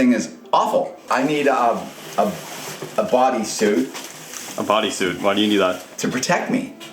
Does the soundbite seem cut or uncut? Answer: cut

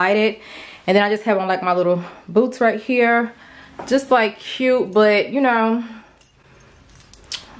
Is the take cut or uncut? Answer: uncut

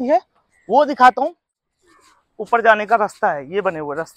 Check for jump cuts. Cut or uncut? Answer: cut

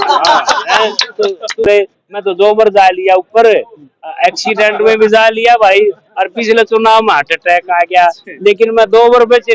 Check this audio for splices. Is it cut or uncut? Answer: cut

